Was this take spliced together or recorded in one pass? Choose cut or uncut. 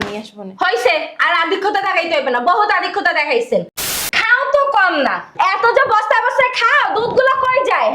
cut